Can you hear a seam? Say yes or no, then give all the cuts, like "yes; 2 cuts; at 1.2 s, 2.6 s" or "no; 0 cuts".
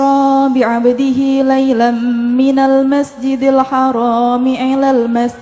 no; 0 cuts